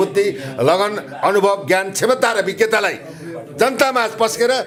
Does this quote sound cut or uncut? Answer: uncut